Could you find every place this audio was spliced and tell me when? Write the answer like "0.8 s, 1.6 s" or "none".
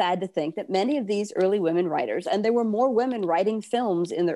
none